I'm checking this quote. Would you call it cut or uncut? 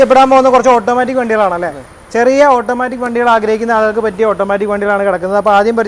uncut